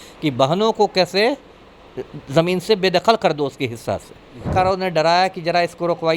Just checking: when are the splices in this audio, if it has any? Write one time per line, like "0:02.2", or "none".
0:04.5